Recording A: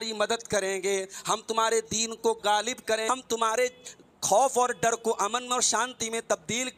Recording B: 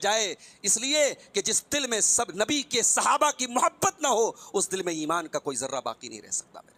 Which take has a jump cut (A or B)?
A